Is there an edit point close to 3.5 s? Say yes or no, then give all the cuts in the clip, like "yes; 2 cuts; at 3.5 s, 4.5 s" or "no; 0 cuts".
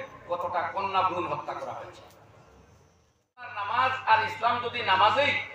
yes; 1 cut; at 3.5 s